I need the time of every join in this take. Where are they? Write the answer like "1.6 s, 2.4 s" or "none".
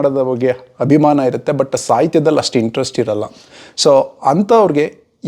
none